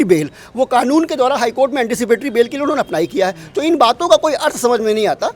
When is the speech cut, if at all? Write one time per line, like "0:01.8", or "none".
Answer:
none